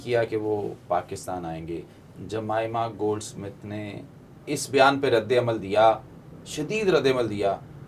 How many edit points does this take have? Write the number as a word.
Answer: zero